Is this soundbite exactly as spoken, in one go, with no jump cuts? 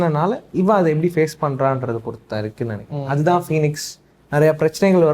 yes; 0 cuts

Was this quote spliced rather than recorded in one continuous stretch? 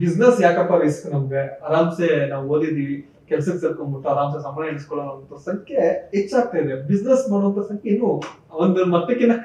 no; 0 cuts

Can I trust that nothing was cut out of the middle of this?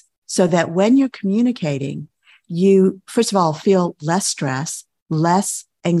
yes; 0 cuts

